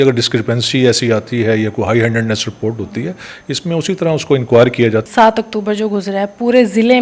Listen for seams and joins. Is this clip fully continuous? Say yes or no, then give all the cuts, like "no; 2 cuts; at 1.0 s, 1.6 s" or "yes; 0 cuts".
no; 1 cut; at 5.1 s